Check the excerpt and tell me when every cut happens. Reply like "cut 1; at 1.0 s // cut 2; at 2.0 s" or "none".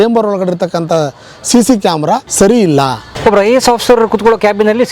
cut 1; at 2.3 s // cut 2; at 3.1 s